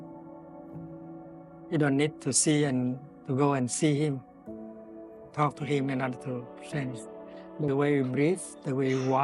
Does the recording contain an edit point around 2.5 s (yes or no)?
no